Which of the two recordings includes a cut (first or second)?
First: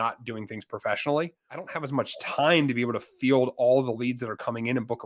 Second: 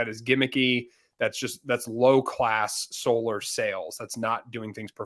first